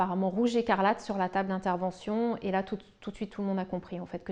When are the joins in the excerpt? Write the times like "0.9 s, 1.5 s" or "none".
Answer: none